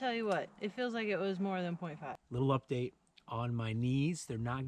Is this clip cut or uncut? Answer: cut